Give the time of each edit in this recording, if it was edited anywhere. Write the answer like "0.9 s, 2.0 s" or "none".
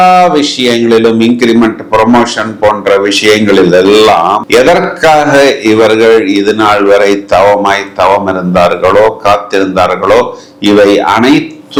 none